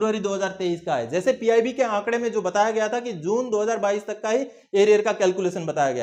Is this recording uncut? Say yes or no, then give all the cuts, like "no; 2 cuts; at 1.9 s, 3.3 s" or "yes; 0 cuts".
yes; 0 cuts